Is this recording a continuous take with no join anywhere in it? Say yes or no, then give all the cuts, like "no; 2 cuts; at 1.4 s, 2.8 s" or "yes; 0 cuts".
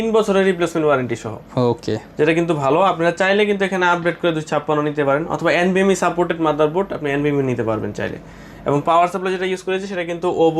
yes; 0 cuts